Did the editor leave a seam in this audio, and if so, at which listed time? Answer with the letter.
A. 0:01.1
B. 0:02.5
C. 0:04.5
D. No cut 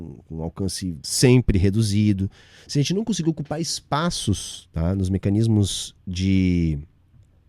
A